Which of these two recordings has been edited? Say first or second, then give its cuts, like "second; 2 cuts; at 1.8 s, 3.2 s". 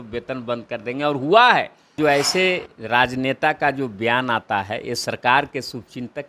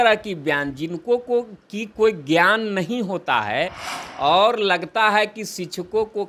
first; 1 cut; at 1.9 s